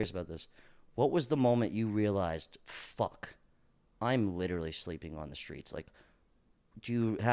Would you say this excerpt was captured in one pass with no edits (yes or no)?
yes